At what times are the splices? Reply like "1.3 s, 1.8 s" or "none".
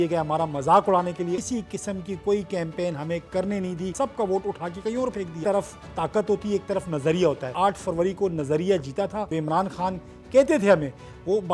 1.4 s, 3.9 s, 5.4 s, 7.5 s, 9.3 s